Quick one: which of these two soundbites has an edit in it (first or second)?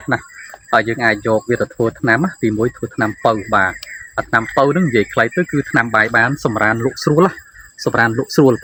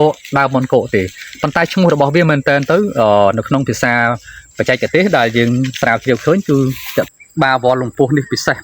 second